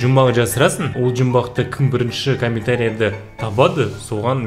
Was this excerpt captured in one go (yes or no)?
no